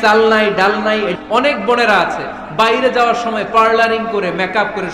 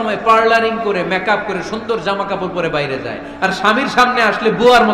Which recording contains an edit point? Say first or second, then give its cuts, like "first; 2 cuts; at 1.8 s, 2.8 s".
first; 1 cut; at 1.1 s